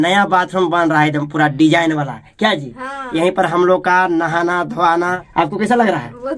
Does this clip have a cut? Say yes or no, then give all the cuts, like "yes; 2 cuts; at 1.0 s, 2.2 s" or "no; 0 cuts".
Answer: yes; 1 cut; at 5.2 s